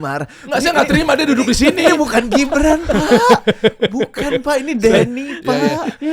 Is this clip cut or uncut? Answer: uncut